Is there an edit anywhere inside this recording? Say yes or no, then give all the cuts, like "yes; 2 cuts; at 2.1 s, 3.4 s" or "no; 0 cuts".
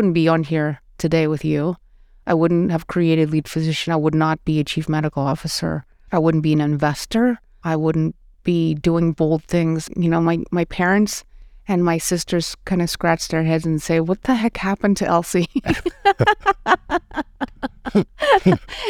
yes; 3 cuts; at 5.9 s, 7.5 s, 9.8 s